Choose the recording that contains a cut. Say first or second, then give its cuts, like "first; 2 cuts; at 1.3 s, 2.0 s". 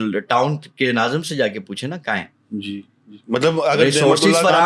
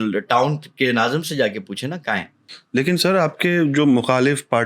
second; 1 cut; at 2.4 s